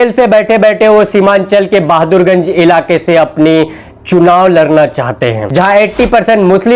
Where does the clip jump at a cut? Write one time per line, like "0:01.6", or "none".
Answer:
0:05.4

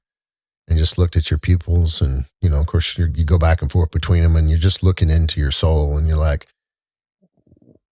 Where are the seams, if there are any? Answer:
none

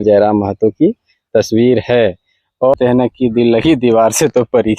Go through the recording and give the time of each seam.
0:02.7

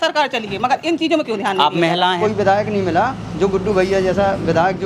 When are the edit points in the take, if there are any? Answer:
0:02.2

